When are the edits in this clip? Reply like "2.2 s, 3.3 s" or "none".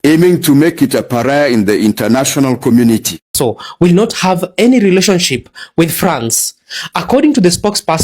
3.3 s